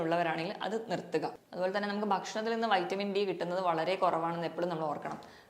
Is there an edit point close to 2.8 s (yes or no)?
no